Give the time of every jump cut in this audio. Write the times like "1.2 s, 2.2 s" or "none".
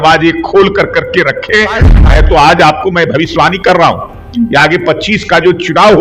1.9 s